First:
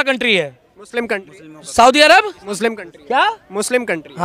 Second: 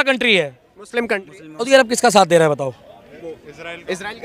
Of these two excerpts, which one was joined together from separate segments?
second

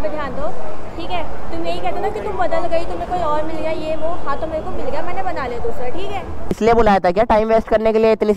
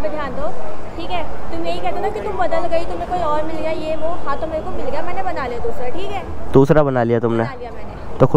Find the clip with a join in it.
first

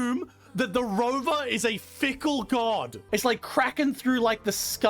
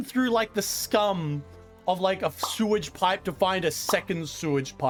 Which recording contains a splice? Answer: first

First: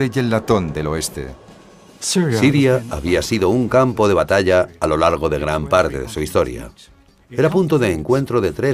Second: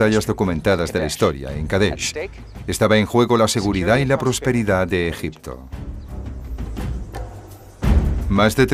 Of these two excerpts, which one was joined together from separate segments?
first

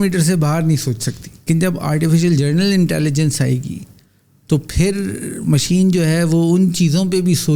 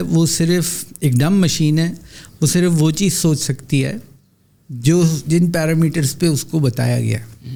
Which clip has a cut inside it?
first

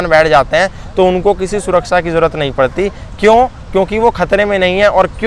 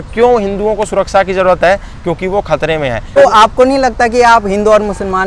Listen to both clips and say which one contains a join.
second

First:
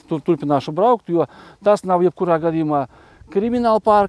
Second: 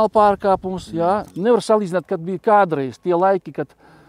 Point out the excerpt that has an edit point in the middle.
second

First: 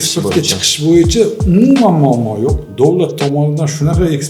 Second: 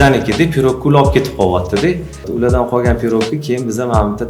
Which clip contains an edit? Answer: second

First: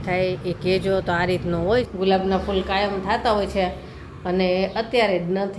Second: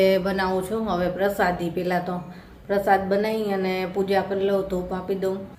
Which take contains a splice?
first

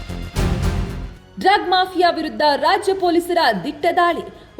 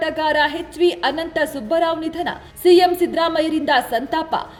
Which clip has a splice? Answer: first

